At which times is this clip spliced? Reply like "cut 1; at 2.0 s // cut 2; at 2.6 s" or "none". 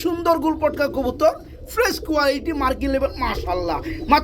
none

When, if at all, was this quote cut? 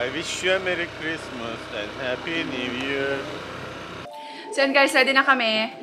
cut 1; at 3.8 s

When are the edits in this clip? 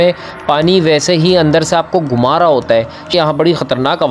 cut 1; at 3.1 s

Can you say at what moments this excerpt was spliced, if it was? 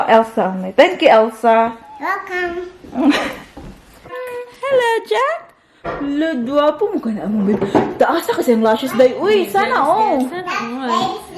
cut 1; at 4.2 s

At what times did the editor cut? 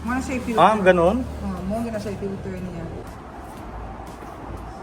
cut 1; at 3.0 s

